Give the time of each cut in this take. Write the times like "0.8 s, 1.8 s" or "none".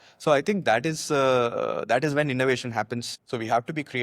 3.1 s